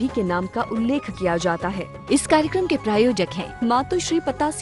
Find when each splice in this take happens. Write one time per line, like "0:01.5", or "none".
0:01.9